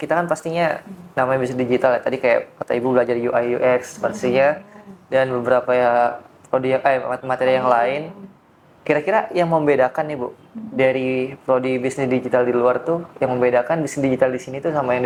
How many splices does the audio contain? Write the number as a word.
zero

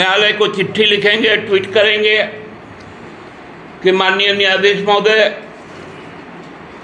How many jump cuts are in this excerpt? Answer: zero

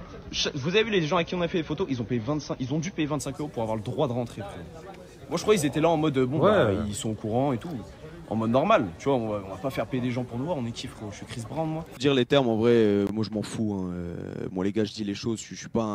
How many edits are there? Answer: one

